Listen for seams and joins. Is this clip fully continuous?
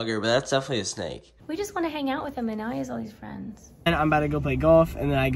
no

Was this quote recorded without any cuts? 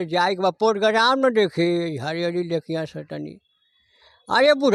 yes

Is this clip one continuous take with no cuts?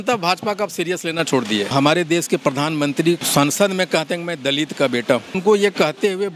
no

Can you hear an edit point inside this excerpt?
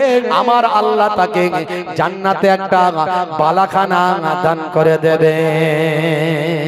no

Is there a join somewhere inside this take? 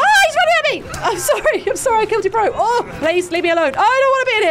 yes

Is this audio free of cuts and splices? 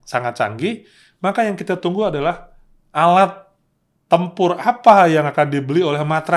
yes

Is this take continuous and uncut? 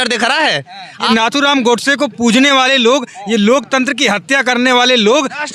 no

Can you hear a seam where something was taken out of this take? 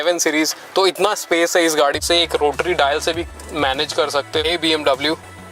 yes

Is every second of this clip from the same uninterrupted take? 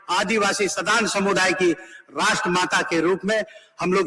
yes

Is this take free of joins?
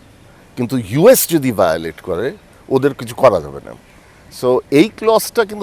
yes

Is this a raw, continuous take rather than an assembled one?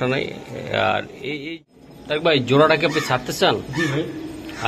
no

